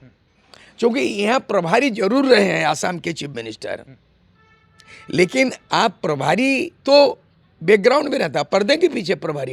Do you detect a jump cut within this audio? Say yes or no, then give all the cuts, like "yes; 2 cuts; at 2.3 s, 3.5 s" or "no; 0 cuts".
no; 0 cuts